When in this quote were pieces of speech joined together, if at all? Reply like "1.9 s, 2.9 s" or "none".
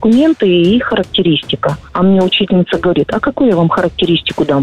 none